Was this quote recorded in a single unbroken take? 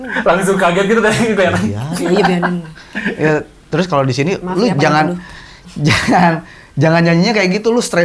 yes; 0 cuts

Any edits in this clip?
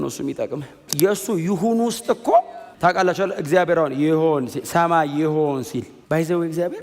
yes; 3 cuts; at 0.8 s, 2.6 s, 5.9 s

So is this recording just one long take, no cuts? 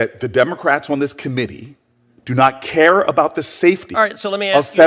yes; 0 cuts

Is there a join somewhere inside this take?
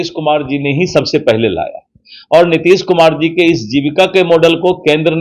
no; 0 cuts

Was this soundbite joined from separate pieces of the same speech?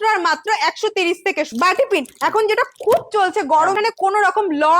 yes; 2 cuts; at 1.5 s, 3.7 s

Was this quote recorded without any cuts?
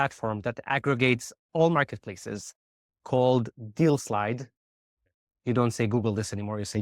no; 1 cut; at 5.0 s

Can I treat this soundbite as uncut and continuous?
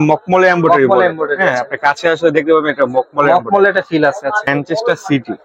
no; 1 cut; at 4.5 s

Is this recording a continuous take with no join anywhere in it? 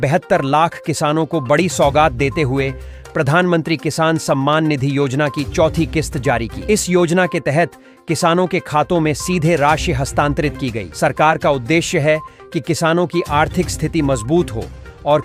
yes; 0 cuts

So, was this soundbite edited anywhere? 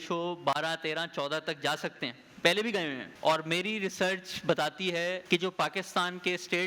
yes; 2 cuts; at 3.0 s, 5.2 s

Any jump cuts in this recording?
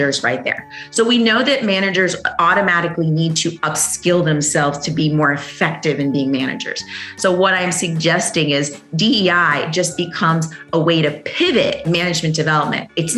yes; 1 cut; at 11.8 s

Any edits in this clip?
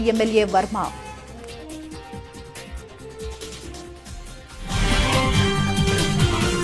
no; 0 cuts

